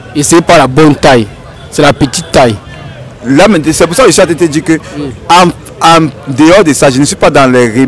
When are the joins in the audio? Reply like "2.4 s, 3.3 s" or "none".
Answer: none